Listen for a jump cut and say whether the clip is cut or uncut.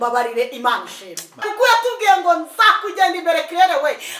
cut